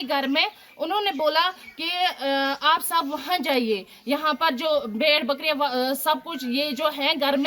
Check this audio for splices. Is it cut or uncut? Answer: uncut